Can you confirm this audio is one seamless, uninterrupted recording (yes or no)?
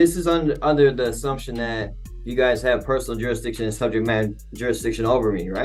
yes